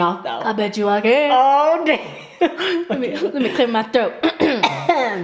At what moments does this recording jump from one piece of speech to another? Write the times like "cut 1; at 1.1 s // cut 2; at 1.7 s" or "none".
none